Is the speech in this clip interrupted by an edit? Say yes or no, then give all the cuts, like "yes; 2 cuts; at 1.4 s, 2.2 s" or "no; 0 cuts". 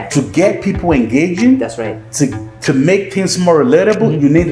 no; 0 cuts